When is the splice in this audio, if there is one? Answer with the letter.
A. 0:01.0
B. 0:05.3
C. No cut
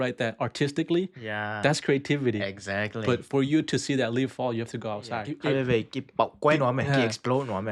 B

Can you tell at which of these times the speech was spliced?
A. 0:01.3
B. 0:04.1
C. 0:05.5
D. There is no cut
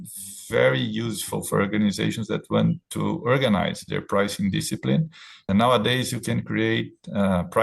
C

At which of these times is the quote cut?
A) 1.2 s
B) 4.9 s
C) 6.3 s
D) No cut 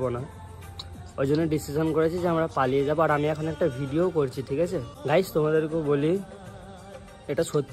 B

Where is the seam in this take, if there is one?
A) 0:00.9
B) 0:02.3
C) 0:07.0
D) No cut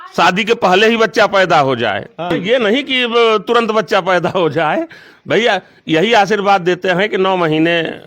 B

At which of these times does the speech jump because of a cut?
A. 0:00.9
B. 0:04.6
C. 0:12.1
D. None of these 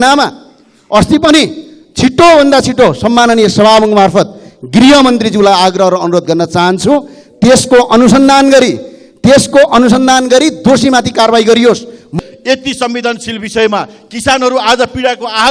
C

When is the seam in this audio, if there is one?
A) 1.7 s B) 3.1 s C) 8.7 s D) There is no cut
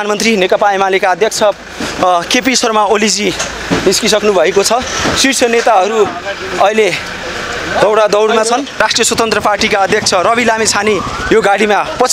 C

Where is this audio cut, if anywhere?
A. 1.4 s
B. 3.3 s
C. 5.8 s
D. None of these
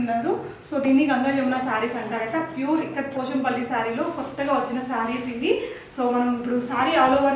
D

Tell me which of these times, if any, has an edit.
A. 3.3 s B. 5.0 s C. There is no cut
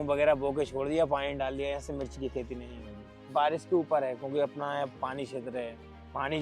A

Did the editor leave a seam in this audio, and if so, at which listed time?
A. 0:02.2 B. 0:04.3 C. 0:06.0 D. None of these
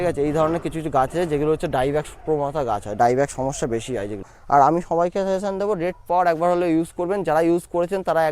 B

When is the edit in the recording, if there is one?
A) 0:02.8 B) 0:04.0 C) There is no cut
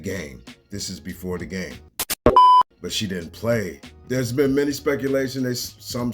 A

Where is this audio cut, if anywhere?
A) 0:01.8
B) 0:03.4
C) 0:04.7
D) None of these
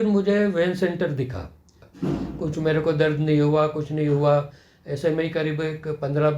A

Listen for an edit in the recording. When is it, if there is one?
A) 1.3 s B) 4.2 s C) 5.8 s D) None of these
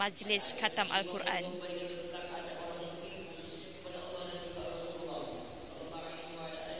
D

